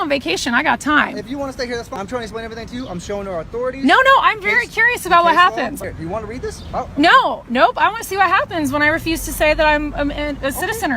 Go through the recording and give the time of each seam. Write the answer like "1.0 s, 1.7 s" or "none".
2.0 s, 5.8 s